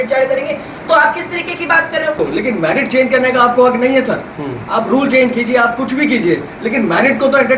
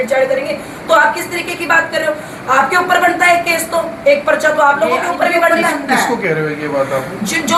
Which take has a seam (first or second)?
first